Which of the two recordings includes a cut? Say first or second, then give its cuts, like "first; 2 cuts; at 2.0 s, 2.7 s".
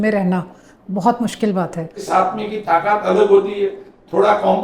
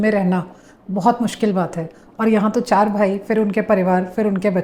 first; 1 cut; at 2.0 s